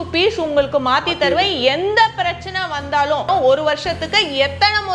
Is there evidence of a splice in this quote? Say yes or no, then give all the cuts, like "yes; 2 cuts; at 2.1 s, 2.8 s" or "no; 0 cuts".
yes; 1 cut; at 3.3 s